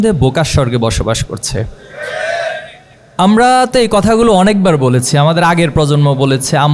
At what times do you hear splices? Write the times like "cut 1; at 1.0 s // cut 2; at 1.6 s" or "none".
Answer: none